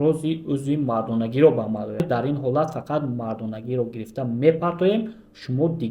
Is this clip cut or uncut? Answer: cut